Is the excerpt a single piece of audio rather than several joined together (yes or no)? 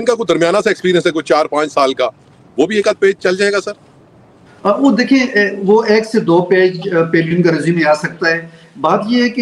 yes